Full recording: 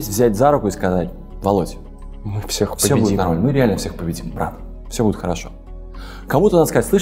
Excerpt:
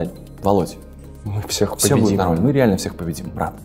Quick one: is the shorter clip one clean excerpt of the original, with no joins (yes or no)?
yes